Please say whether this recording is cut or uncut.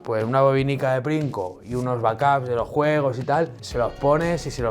cut